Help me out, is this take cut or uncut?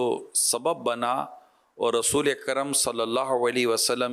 uncut